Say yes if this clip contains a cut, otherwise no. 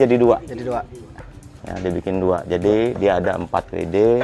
no